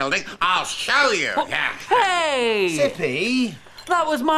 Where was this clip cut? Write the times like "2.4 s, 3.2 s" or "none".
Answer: 1.8 s